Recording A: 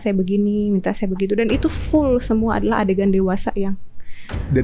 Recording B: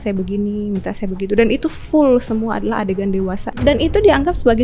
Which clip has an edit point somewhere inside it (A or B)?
B